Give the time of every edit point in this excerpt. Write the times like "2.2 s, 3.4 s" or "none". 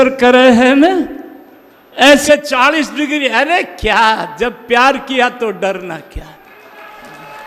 2.2 s